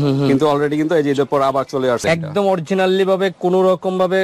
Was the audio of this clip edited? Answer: yes; 1 cut; at 2.0 s

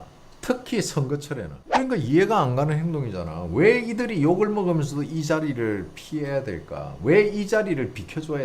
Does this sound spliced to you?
yes; 1 cut; at 1.5 s

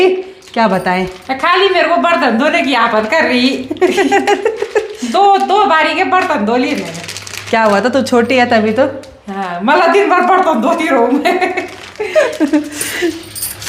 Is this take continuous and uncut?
yes; 0 cuts

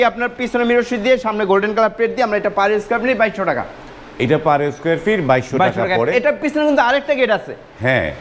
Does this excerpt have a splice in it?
no; 0 cuts

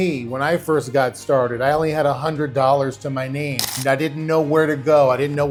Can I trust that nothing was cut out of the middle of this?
yes; 0 cuts

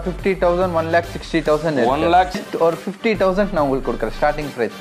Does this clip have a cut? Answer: yes; 1 cut; at 2.5 s

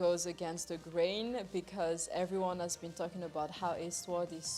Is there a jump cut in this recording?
no; 0 cuts

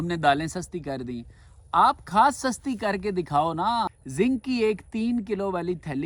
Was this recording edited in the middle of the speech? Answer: yes; 1 cut; at 4.0 s

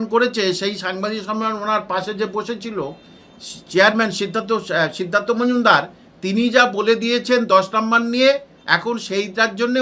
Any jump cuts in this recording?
no; 0 cuts

